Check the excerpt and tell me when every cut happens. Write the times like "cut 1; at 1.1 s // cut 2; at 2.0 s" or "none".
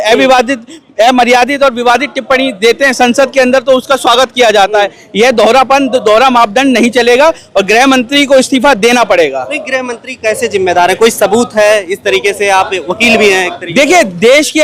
none